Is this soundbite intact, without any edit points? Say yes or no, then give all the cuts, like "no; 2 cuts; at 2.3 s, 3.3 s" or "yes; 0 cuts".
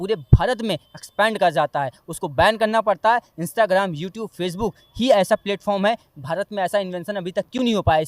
yes; 0 cuts